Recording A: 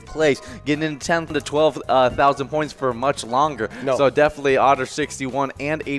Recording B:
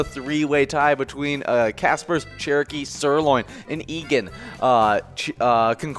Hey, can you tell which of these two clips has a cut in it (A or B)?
A